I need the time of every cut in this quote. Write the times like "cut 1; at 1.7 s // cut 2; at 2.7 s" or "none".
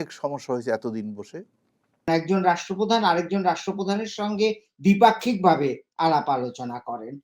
cut 1; at 2.1 s